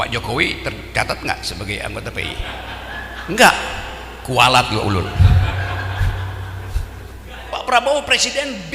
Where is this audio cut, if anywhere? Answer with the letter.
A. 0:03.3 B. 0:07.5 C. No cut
B